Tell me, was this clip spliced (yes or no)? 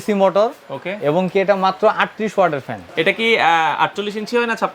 yes